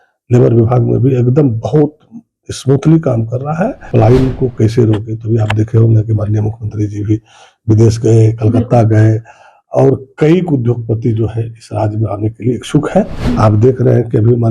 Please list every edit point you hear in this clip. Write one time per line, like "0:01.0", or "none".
0:03.9
0:13.1